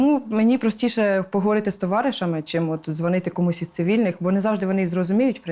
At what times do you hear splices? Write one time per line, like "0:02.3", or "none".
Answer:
none

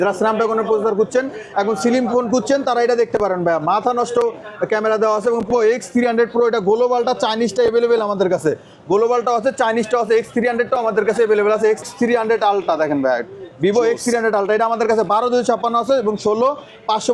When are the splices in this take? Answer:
0:05.5
0:11.9

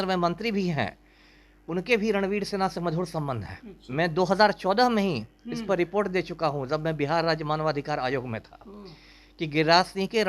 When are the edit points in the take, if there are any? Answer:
none

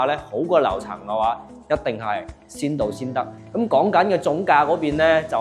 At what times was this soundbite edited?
0:03.4

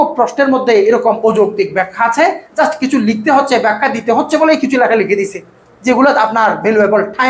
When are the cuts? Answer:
none

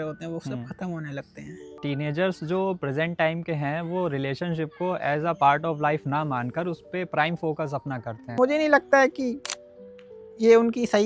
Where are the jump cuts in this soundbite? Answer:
0:01.6
0:08.2

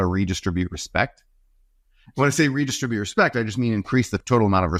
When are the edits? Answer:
none

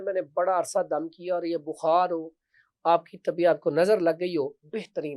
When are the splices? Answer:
none

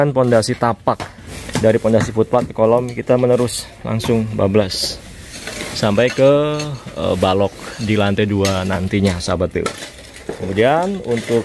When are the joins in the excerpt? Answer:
0:01.4

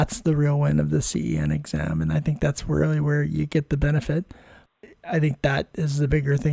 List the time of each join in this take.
0:04.7

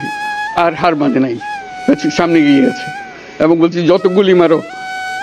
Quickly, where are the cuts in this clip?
none

